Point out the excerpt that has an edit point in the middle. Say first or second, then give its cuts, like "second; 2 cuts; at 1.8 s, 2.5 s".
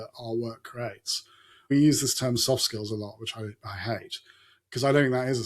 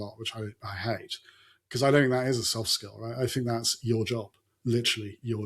first; 1 cut; at 1.7 s